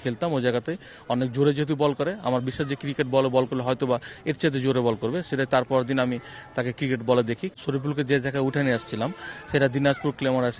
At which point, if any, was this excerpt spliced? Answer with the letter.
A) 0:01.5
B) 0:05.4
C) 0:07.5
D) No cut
C